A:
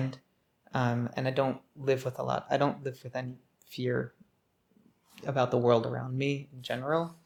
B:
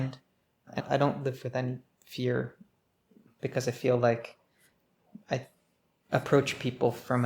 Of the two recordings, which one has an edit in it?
B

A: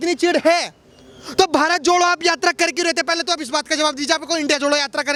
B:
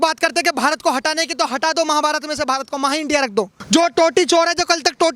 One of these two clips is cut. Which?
B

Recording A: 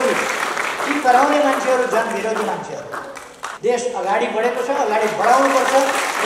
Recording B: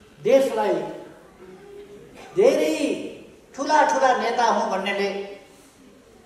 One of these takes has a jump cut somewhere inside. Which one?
A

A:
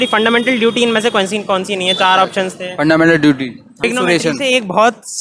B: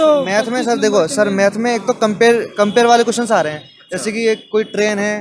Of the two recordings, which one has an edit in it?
A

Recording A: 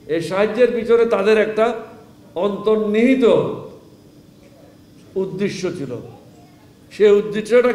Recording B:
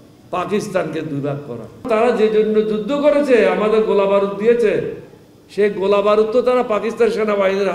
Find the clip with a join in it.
B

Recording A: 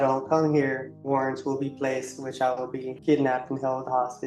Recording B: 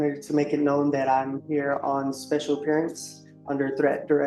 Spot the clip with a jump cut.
A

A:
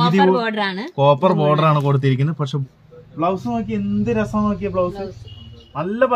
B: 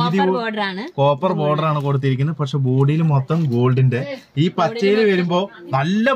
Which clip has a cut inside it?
A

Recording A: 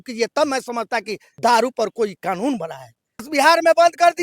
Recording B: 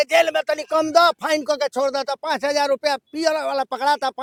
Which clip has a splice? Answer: A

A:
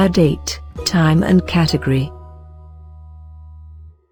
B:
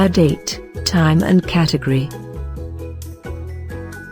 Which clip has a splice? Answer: B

